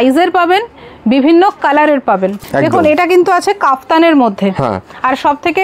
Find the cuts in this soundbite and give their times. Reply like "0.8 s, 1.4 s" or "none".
2.4 s